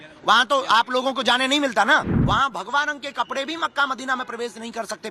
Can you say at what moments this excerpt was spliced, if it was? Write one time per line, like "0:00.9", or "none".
0:02.1